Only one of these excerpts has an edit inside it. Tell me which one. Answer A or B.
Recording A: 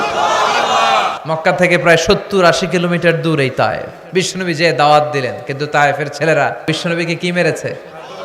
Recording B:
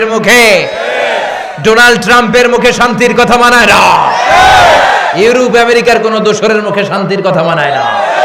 A